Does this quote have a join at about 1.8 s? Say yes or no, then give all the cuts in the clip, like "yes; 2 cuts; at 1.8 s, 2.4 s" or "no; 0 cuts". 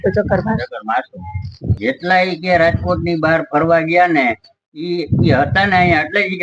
yes; 1 cut; at 1.8 s